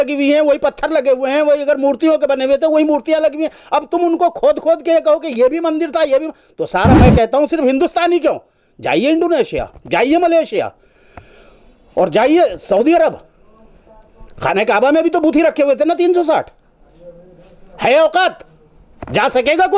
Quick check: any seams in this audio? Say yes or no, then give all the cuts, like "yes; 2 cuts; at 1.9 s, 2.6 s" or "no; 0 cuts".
no; 0 cuts